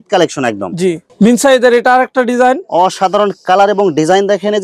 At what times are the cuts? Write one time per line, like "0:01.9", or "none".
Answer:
0:01.0